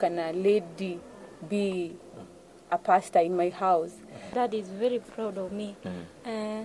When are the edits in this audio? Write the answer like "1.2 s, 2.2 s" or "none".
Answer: 4.3 s